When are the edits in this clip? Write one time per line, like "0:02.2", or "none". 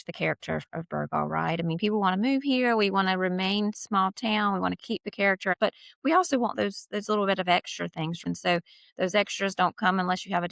0:05.5
0:08.2